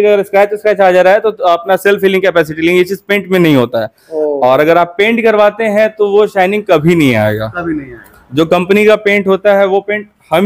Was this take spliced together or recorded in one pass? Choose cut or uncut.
uncut